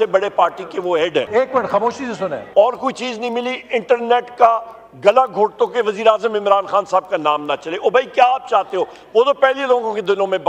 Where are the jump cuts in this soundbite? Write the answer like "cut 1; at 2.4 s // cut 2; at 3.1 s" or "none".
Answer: cut 1; at 1.8 s